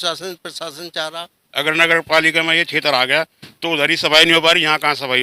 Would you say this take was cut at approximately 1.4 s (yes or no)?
yes